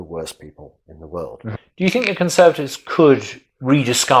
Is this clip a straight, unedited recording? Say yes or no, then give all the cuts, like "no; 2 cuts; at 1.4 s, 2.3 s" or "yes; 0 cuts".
no; 1 cut; at 1.4 s